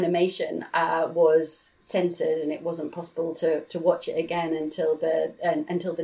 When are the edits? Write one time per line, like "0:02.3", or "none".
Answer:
none